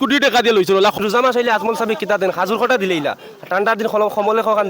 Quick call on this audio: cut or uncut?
cut